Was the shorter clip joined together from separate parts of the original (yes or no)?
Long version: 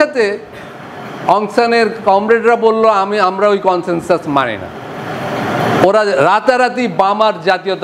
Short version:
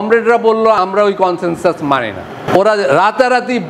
yes